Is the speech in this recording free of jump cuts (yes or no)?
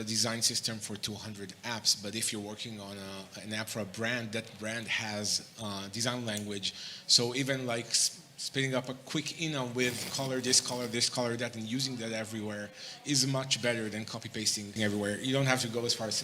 no